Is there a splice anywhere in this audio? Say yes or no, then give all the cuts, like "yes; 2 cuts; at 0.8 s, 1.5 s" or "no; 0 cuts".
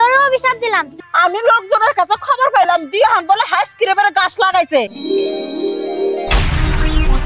yes; 2 cuts; at 1.0 s, 4.9 s